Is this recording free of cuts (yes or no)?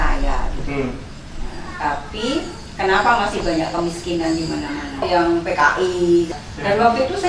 no